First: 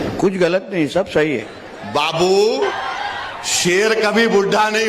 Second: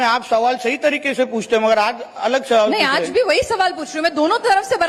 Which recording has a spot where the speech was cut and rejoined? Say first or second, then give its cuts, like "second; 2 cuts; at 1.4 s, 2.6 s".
first; 2 cuts; at 1.5 s, 2.8 s